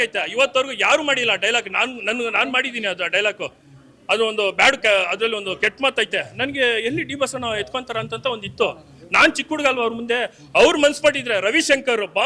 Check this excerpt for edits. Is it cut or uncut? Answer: uncut